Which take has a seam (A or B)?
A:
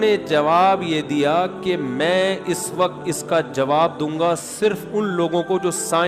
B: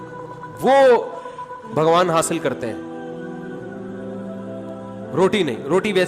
B